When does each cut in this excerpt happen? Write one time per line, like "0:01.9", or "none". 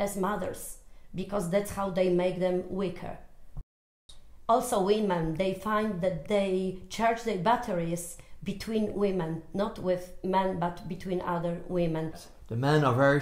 0:03.6
0:12.2

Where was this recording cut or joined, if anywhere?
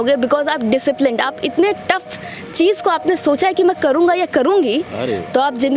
none

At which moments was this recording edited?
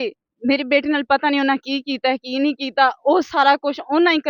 none

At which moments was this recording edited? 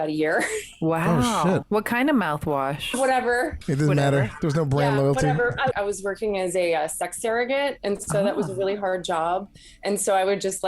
0:01.6
0:03.6
0:05.7

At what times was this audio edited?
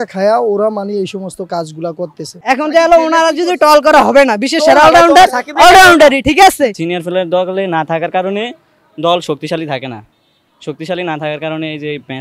0:02.4
0:06.7

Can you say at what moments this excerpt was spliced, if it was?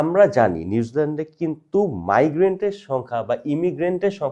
none

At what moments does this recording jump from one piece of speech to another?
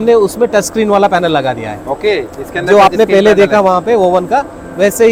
none

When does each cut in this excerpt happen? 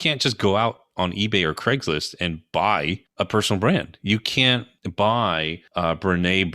0:02.8
0:04.8
0:05.6

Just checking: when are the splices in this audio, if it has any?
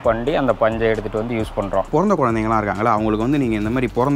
0:01.9

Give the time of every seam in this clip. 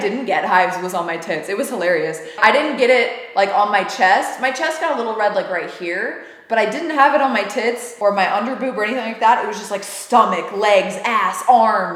none

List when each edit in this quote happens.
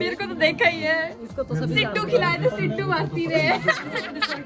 none

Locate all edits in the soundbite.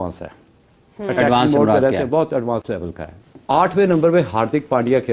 0:03.2

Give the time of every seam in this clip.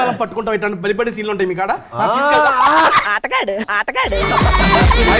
none

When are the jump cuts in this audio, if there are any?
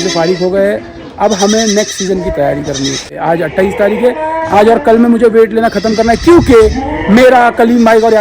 0:03.2

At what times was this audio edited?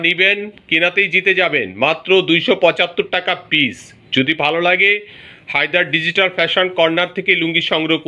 none

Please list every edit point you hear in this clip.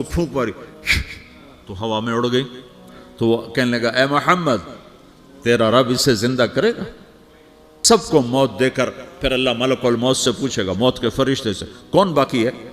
0:07.7

